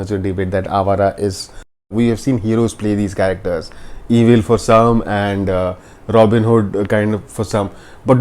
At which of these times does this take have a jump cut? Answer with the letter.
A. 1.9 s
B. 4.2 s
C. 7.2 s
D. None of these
A